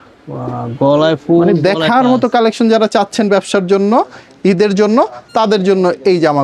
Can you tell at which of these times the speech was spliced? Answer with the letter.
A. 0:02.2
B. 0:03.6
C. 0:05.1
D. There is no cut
D